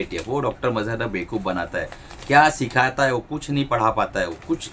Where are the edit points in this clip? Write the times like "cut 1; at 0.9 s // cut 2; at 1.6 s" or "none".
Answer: none